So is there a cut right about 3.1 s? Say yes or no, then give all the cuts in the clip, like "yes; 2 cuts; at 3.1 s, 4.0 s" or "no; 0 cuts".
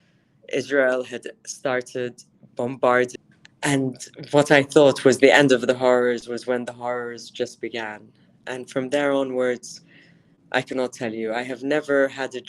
yes; 1 cut; at 3.1 s